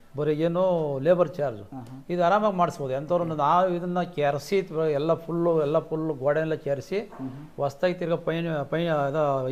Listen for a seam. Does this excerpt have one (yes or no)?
no